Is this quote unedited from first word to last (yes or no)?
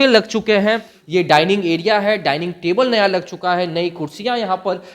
no